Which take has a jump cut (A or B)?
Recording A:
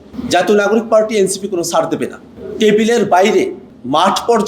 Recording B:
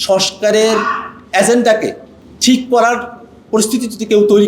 A